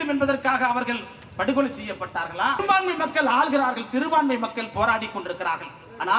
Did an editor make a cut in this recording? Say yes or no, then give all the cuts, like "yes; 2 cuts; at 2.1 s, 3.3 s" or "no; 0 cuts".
yes; 1 cut; at 2.6 s